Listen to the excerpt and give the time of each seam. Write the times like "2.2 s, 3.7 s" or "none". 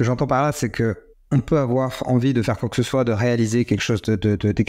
1.1 s

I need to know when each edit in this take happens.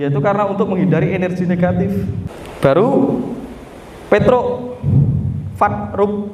2.2 s

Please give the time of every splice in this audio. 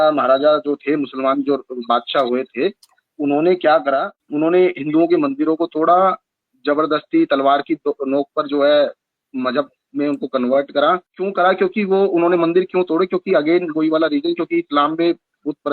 4.2 s, 11.2 s

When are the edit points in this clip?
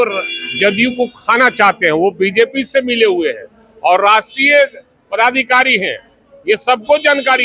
none

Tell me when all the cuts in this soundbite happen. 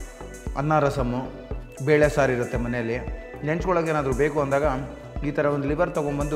none

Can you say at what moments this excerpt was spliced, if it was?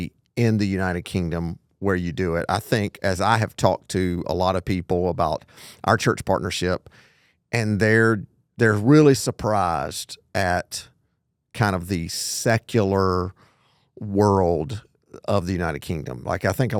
none

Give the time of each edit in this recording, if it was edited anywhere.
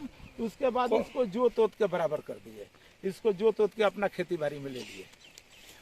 none

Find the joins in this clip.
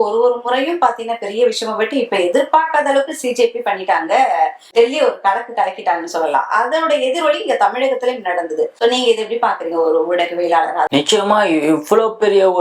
none

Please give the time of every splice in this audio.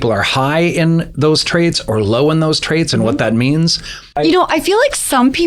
4.2 s

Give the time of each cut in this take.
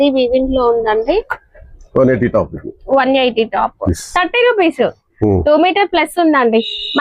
3.9 s

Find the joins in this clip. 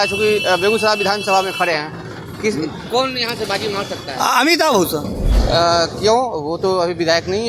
5.3 s

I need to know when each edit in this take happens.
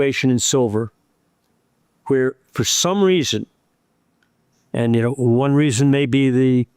none

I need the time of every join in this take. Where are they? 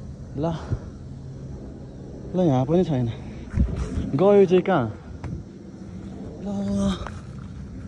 none

